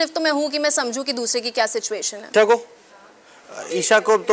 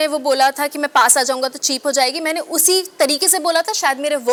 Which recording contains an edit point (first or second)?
first